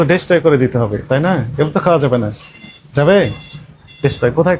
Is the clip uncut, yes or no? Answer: yes